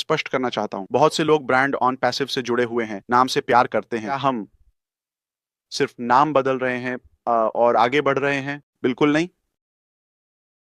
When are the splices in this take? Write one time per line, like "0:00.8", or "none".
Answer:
0:04.1